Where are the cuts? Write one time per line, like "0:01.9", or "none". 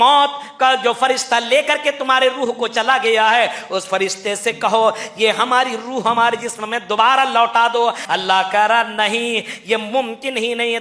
0:08.0